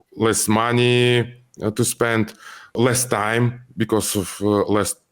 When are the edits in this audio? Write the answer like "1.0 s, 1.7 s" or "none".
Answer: 2.7 s